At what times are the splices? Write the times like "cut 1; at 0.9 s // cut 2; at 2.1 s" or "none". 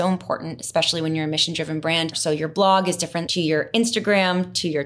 cut 1; at 2.2 s // cut 2; at 3.2 s